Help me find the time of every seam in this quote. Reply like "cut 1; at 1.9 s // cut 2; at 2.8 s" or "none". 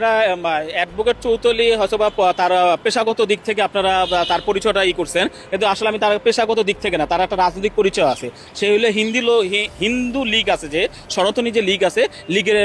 none